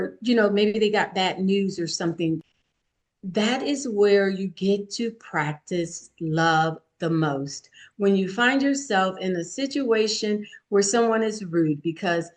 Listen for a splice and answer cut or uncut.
cut